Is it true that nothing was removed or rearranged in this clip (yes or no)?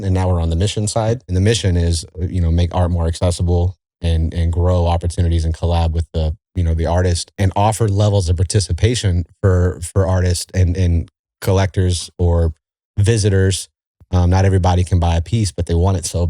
no